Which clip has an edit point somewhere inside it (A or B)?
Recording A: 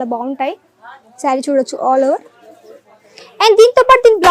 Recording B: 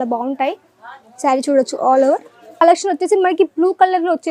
B